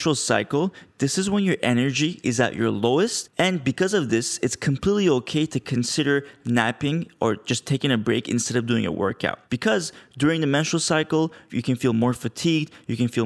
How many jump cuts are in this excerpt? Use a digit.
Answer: 2